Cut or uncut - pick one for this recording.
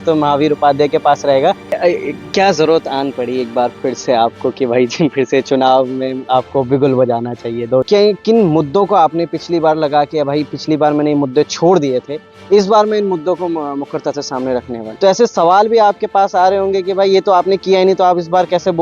cut